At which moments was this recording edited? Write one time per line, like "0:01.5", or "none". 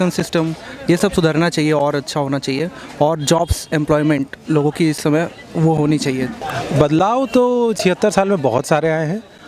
none